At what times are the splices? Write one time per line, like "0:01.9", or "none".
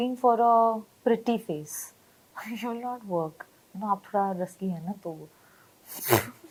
none